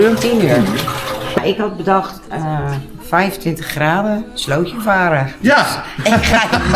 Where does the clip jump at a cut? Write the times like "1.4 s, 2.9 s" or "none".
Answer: 1.4 s